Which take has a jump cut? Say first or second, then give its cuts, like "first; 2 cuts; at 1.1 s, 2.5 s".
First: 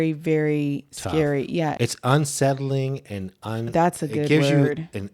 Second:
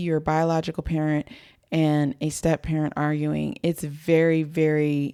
first; 1 cut; at 1.7 s